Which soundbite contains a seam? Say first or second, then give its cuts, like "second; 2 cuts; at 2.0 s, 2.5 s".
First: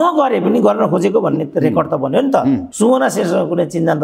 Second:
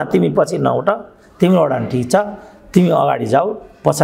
first; 1 cut; at 2.7 s